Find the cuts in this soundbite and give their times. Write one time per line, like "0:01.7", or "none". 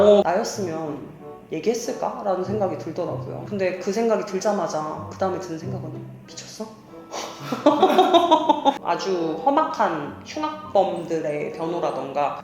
0:08.8